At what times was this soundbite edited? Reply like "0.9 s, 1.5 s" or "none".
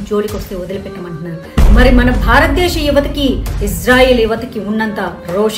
1.4 s